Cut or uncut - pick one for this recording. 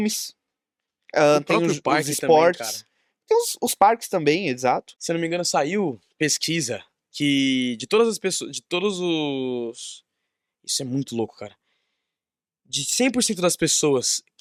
uncut